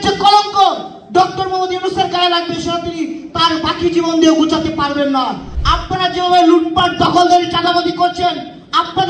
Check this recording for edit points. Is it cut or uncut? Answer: cut